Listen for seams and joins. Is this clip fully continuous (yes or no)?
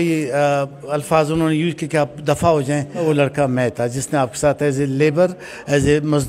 no